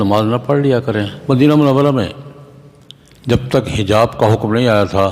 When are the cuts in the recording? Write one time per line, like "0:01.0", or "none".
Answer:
0:01.1